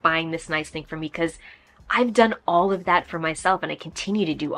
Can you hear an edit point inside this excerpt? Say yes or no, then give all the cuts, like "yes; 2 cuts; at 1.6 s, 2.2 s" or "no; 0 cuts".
no; 0 cuts